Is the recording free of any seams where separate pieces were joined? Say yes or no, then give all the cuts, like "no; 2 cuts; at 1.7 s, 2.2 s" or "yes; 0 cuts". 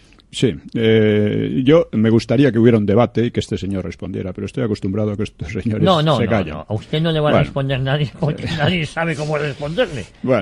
no; 1 cut; at 5.8 s